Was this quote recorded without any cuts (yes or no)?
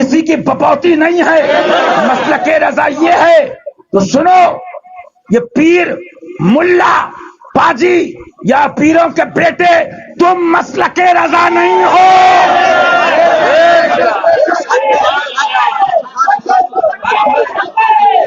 yes